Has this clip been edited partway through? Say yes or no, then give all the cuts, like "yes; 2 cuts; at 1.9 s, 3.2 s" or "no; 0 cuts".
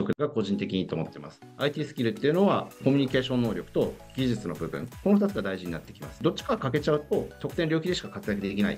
yes; 1 cut; at 1.4 s